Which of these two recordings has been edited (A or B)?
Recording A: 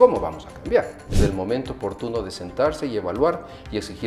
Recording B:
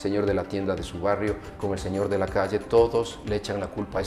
A